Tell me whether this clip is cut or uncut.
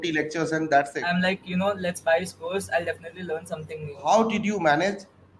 cut